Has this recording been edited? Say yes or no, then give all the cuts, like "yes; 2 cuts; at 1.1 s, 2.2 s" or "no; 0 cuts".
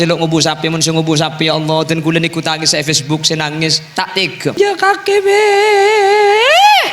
yes; 1 cut; at 4.6 s